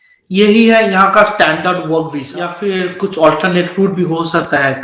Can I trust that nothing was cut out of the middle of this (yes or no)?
no